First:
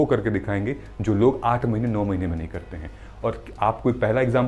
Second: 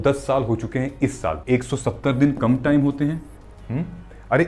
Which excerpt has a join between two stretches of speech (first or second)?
second